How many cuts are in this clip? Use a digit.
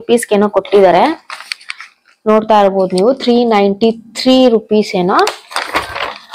0